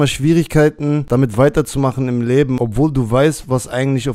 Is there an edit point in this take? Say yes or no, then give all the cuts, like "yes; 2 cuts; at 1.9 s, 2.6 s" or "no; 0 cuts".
yes; 2 cuts; at 1.0 s, 2.6 s